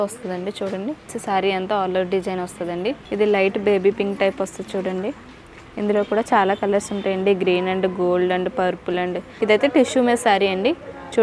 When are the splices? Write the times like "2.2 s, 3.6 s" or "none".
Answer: 1.1 s, 3.0 s, 9.3 s